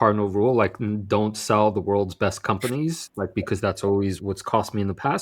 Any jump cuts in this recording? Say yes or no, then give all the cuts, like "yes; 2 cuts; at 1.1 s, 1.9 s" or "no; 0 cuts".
yes; 1 cut; at 4.2 s